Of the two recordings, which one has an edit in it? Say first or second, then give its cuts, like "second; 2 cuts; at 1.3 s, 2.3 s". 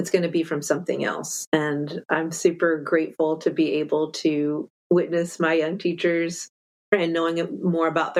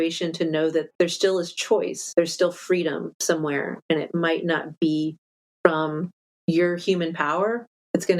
second; 2 cuts; at 0.9 s, 2.0 s